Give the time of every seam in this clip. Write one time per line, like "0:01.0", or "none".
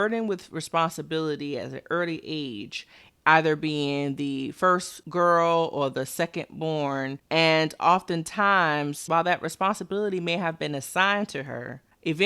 0:07.2